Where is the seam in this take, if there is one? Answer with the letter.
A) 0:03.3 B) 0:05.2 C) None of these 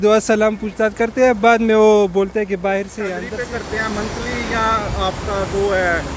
A